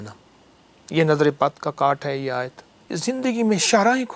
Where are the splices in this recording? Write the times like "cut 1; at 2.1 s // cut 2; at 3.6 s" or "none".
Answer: cut 1; at 2.9 s